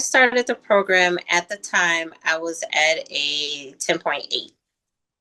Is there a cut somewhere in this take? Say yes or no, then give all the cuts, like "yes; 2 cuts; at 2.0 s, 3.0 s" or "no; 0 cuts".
no; 0 cuts